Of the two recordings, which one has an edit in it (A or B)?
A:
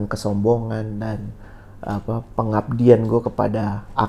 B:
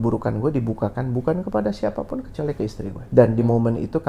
B